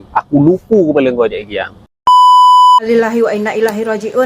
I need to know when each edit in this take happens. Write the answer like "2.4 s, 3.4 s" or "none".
2.8 s